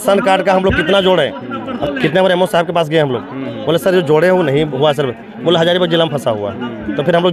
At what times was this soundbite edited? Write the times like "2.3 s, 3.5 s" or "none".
1.7 s